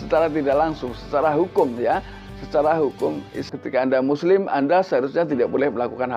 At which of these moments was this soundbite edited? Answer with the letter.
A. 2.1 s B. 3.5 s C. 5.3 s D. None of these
B